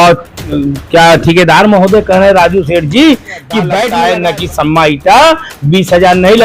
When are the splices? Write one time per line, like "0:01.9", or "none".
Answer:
0:03.9